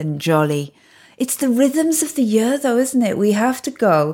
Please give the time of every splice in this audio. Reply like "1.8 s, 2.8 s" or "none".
none